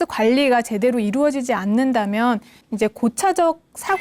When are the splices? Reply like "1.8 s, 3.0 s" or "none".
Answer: 2.6 s